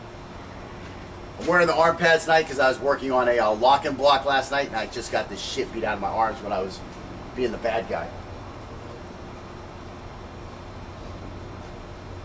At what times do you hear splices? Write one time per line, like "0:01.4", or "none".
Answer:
0:03.0